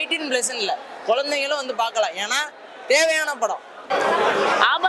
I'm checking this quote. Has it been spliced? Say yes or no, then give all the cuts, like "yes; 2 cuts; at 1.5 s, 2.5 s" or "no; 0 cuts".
yes; 1 cut; at 3.8 s